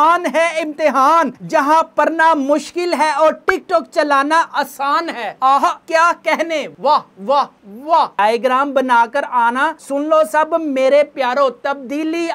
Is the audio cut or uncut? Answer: cut